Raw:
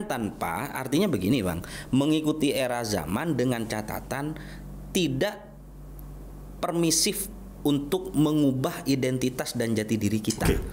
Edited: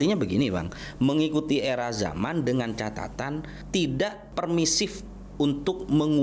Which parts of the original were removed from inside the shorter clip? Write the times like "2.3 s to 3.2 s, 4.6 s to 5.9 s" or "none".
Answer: 4.5 s to 4.8 s, 5.4 s to 6.5 s